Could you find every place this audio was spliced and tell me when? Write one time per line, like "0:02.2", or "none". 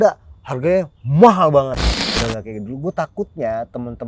0:01.9